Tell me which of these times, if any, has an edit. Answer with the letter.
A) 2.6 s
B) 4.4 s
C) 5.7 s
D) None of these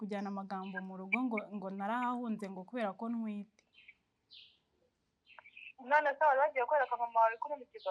D